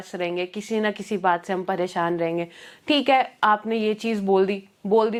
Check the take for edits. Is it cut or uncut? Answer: uncut